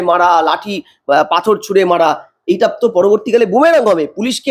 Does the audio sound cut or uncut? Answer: uncut